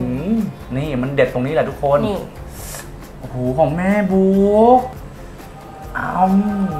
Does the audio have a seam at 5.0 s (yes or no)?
yes